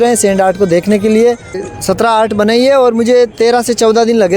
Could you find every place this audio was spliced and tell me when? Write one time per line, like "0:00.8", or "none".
0:01.5